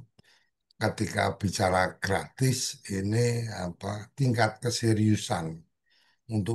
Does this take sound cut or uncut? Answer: uncut